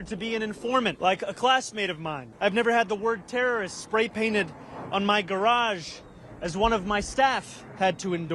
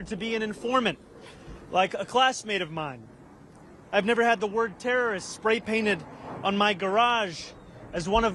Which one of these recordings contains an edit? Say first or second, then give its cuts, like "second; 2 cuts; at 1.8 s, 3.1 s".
first; 2 cuts; at 1.0 s, 2.2 s